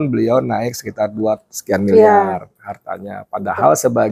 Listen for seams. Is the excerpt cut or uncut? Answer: uncut